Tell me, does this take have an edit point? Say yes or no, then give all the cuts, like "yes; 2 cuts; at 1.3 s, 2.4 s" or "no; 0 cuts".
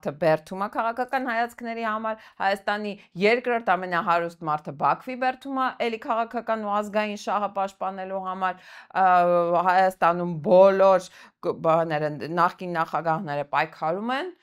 no; 0 cuts